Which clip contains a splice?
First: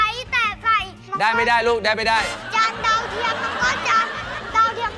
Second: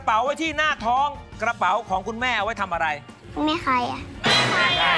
first; 1 cut; at 1.1 s

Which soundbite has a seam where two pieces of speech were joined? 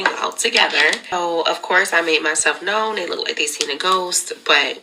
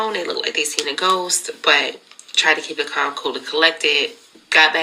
first; 1 cut; at 1.1 s

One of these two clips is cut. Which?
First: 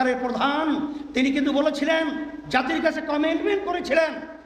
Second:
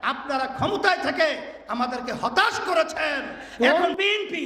second; 1 cut; at 3.4 s

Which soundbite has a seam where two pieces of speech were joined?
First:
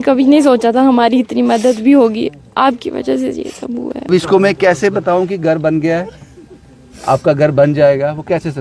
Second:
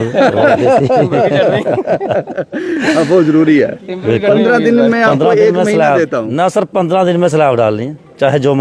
first; 1 cut; at 4.1 s

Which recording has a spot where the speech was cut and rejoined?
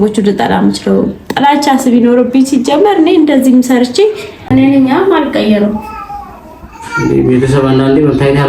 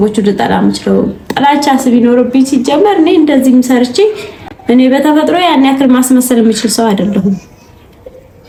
first; 1 cut; at 4.4 s

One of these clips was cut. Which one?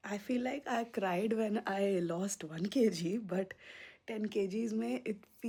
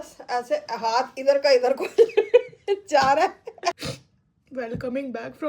second; 1 cut; at 3.7 s

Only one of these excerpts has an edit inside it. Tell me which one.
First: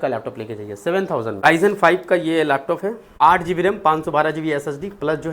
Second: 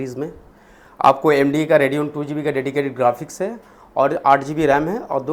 first; 2 cuts; at 1.4 s, 3.1 s

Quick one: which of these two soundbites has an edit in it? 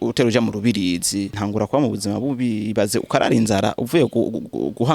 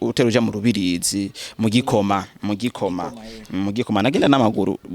first; 1 cut; at 1.4 s

